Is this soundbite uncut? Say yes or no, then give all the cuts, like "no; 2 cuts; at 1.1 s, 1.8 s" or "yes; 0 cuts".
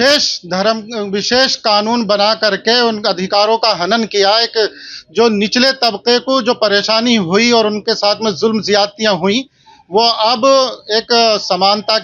yes; 0 cuts